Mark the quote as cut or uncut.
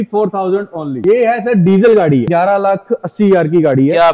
cut